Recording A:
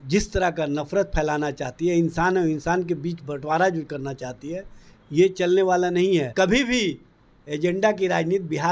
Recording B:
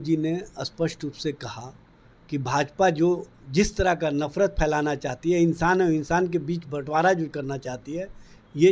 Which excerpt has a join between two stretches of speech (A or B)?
A